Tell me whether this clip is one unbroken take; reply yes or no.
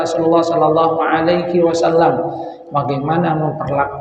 yes